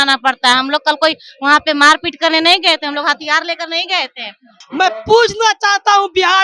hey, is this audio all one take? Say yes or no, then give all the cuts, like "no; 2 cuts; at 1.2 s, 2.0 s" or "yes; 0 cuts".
no; 1 cut; at 4.6 s